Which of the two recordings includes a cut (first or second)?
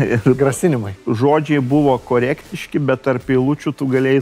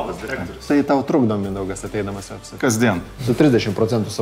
second